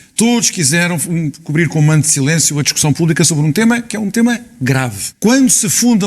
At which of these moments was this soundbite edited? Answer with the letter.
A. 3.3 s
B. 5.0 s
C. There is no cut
B